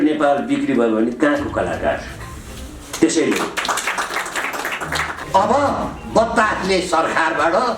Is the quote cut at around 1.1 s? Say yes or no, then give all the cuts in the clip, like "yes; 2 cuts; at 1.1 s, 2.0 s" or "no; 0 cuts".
no; 1 cut; at 5.2 s